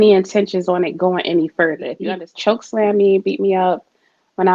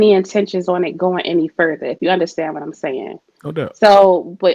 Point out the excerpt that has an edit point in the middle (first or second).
first